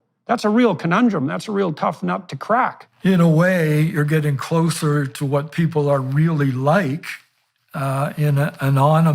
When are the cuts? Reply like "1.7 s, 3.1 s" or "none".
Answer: 2.8 s